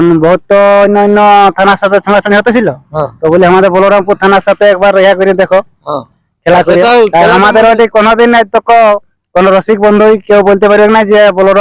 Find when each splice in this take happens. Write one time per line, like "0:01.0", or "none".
none